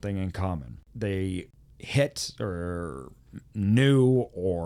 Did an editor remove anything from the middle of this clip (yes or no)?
no